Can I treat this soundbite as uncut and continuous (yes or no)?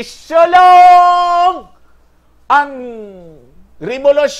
yes